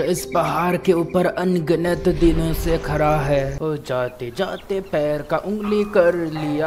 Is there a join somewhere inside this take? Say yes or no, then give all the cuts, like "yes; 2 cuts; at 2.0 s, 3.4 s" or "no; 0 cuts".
yes; 1 cut; at 3.5 s